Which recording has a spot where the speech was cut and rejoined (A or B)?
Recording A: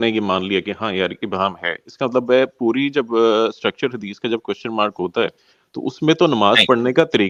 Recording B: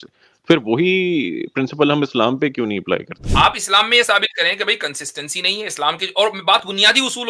B